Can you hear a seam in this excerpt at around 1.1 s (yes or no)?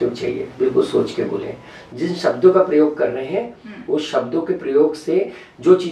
no